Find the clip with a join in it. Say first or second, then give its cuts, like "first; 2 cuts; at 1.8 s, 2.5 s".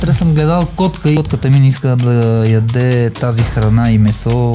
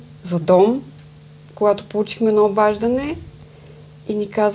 first; 1 cut; at 1.2 s